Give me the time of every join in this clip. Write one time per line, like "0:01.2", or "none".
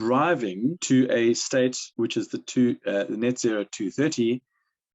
0:00.8
0:01.8